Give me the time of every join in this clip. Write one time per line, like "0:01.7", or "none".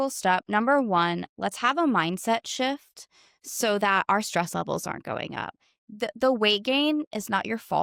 none